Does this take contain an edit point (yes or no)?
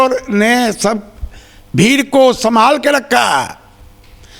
no